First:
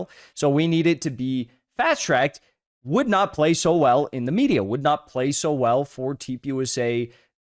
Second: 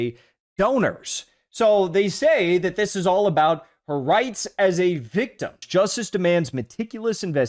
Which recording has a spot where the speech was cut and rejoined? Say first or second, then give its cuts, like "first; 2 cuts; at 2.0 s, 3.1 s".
second; 1 cut; at 5.6 s